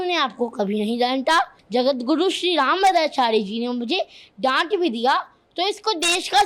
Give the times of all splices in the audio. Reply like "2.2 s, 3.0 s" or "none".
1.6 s